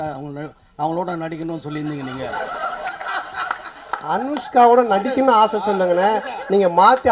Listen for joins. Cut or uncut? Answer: uncut